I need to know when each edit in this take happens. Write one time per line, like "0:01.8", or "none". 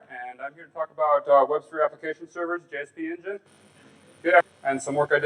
none